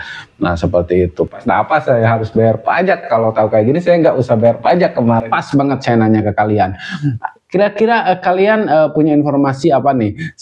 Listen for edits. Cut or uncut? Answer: cut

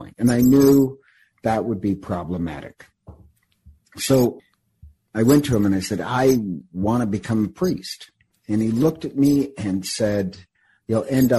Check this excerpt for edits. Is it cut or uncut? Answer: uncut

